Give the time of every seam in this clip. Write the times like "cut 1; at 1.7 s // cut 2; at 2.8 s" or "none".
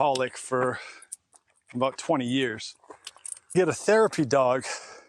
cut 1; at 3.5 s